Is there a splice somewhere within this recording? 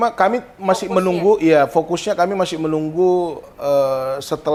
no; 0 cuts

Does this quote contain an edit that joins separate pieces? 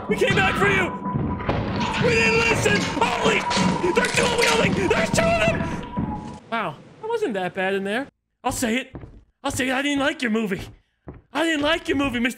yes; 1 cut; at 8.2 s

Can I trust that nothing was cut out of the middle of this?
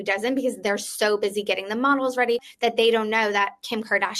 no; 1 cut; at 2.5 s

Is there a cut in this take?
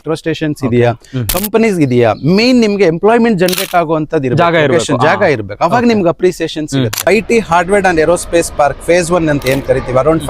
yes; 1 cut; at 7.1 s

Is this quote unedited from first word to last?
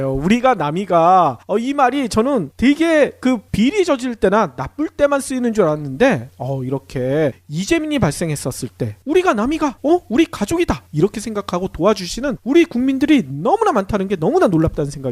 no; 1 cut; at 5.9 s

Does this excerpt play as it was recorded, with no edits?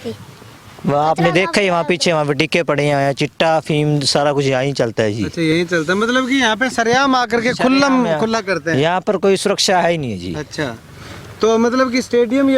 yes; 0 cuts

